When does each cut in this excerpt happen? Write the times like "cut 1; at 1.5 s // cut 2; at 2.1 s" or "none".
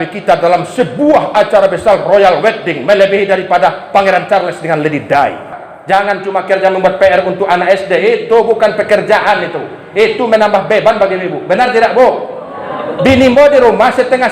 cut 1; at 5.7 s